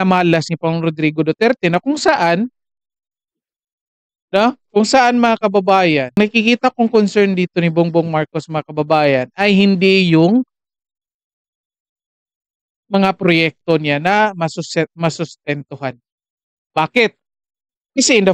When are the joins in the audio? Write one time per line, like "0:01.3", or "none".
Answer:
0:06.2

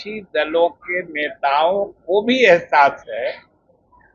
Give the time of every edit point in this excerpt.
none

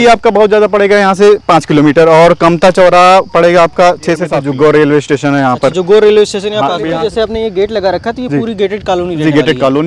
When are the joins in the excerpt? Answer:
0:04.3
0:06.9

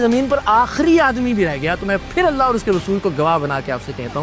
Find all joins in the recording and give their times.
none

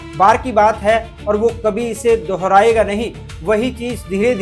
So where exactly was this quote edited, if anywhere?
none

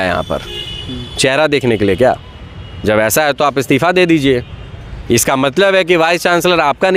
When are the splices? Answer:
none

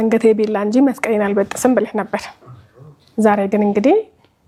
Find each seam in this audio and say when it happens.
none

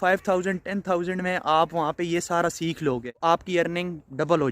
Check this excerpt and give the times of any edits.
0:03.2

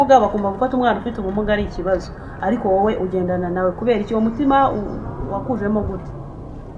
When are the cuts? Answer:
none

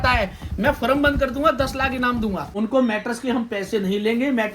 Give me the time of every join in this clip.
0:02.4

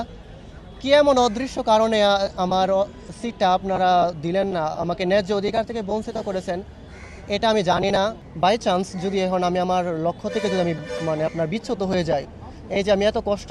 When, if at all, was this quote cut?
0:08.2

